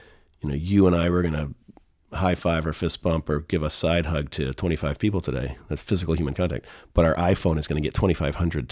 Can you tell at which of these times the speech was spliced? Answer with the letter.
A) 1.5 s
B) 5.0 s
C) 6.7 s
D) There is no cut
D